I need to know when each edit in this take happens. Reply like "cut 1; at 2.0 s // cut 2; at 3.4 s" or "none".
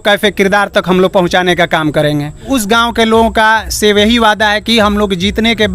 cut 1; at 2.5 s

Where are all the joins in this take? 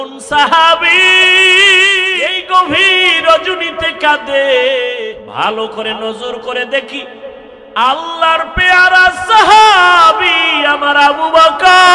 cut 1; at 2.3 s // cut 2; at 5.0 s

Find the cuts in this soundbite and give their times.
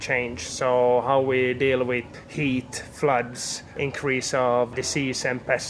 cut 1; at 2.1 s // cut 2; at 3.7 s // cut 3; at 4.7 s

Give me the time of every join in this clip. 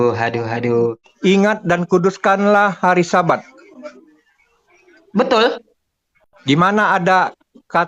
cut 1; at 1.1 s

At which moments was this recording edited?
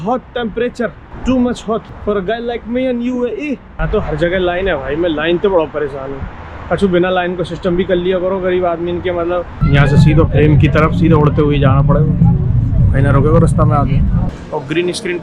cut 1; at 1.1 s // cut 2; at 1.9 s // cut 3; at 3.8 s // cut 4; at 9.6 s // cut 5; at 14.4 s

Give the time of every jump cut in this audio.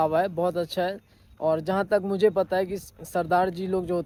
none

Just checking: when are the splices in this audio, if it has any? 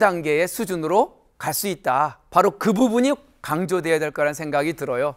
cut 1; at 2.2 s

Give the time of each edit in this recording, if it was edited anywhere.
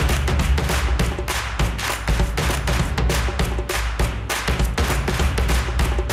none

